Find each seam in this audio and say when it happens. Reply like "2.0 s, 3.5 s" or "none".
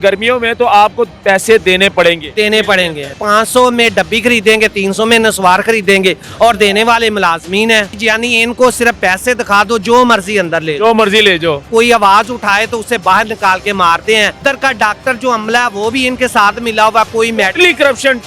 3.2 s, 8.0 s, 11.6 s, 14.4 s